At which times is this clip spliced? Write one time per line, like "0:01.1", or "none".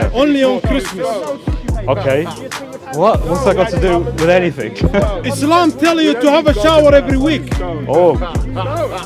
none